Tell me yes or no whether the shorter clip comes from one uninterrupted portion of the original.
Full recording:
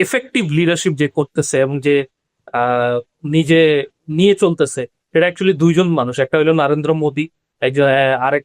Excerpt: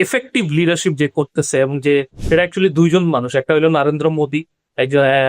no